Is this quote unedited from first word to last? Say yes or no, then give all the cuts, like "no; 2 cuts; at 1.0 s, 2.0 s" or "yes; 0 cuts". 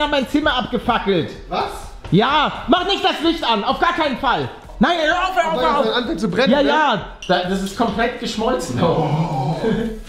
no; 2 cuts; at 4.7 s, 7.1 s